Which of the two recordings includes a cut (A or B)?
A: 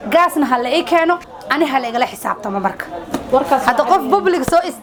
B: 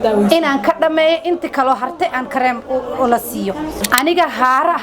B